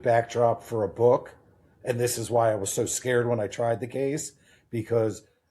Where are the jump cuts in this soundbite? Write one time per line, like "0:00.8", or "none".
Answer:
0:01.8